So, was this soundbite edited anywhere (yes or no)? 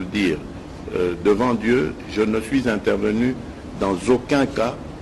no